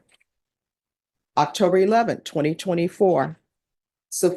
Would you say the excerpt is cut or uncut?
uncut